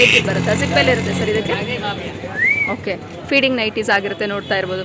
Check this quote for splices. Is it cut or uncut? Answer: uncut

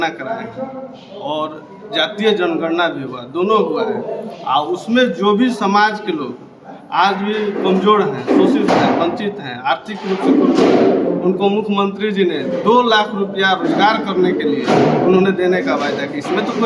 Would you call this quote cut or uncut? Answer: uncut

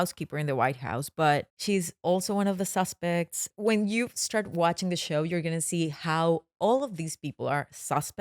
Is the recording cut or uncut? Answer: cut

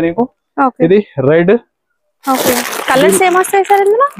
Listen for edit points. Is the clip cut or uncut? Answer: cut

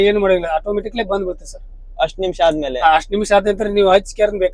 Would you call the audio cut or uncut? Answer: uncut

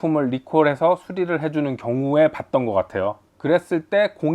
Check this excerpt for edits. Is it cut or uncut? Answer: cut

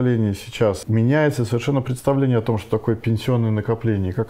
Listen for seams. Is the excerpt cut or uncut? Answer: cut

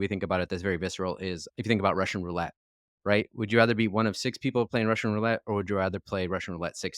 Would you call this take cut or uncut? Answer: cut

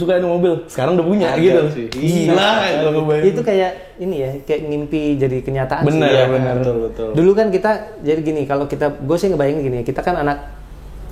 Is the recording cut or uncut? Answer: uncut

